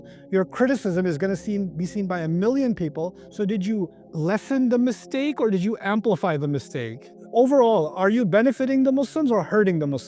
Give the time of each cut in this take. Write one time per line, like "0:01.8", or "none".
0:07.2